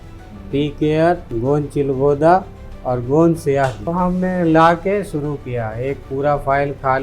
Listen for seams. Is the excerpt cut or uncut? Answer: cut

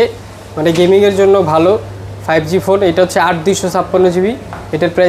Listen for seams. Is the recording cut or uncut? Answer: uncut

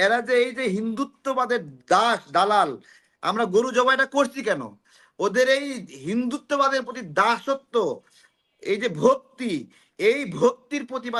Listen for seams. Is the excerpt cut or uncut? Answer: uncut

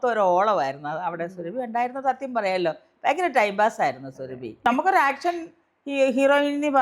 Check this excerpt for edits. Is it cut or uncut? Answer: cut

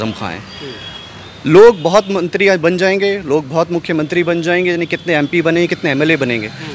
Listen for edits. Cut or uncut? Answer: uncut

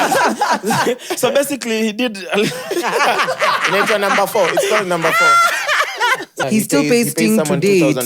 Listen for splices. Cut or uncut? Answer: cut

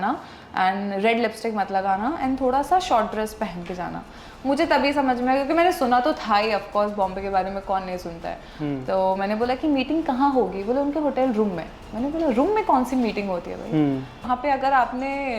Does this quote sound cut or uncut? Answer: cut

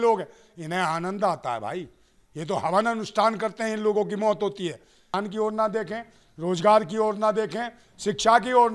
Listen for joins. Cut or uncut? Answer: cut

